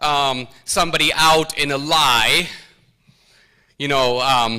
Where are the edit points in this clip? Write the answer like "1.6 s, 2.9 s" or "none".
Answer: 1.9 s

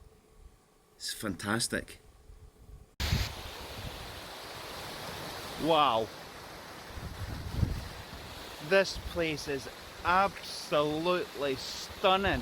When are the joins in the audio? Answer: 2.9 s

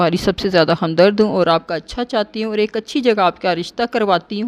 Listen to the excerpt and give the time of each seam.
none

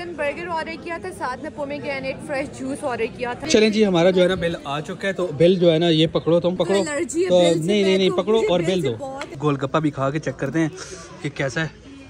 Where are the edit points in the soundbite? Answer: 3.4 s, 9.2 s

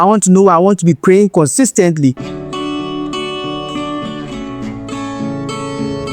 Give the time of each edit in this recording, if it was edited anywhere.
2.2 s

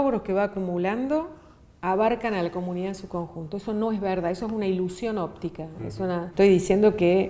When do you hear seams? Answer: 6.2 s

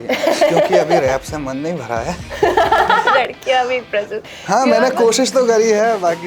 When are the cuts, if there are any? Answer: 1.0 s, 3.1 s

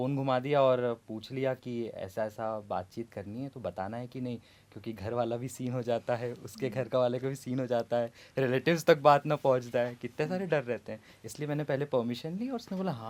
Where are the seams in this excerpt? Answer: none

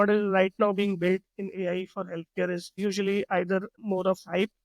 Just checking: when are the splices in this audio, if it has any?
2.7 s, 3.8 s

